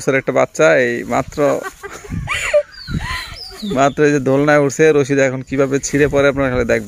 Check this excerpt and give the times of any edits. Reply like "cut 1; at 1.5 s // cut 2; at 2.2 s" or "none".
none